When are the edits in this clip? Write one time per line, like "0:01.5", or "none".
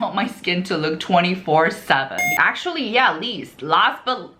0:02.3